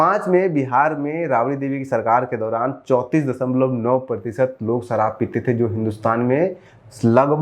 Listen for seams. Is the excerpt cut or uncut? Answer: uncut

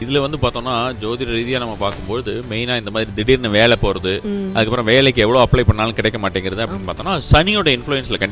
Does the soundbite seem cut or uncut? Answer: uncut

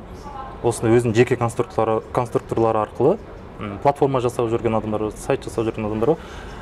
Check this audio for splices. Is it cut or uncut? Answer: uncut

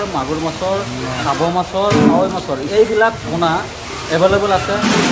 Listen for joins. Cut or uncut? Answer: uncut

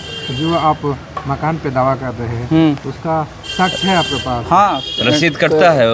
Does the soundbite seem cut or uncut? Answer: uncut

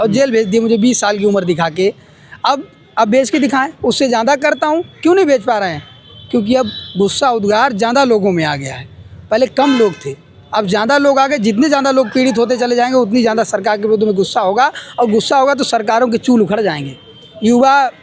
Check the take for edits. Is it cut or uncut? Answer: uncut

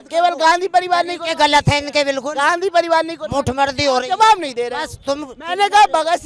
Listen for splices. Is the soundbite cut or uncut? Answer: uncut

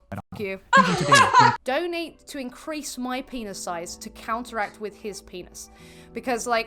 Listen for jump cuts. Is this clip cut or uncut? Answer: cut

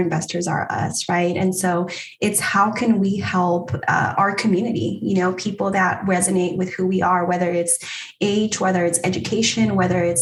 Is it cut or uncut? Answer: uncut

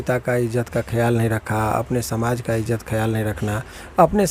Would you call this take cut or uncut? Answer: uncut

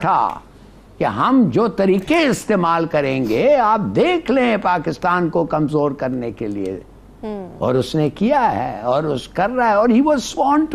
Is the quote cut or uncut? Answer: uncut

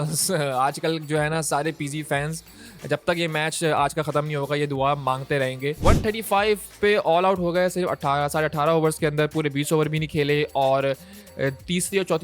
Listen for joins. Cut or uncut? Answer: cut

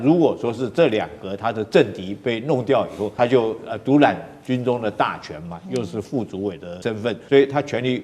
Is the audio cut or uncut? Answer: cut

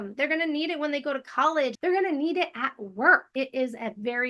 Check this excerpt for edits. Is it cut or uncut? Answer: cut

